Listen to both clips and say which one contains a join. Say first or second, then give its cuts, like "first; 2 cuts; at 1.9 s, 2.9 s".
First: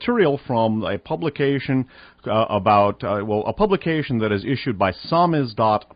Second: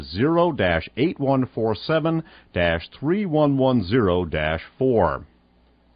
second; 1 cut; at 1.5 s